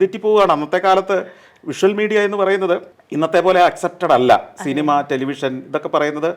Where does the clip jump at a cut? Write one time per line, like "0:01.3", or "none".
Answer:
0:03.0